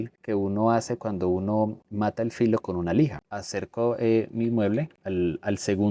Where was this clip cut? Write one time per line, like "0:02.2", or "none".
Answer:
0:03.3